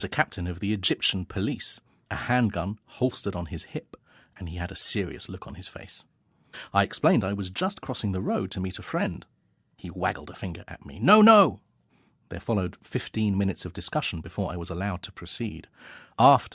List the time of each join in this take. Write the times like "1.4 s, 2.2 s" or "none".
15.4 s